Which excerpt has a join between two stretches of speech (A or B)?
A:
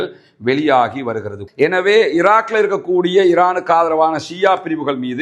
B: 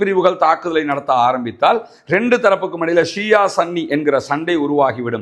A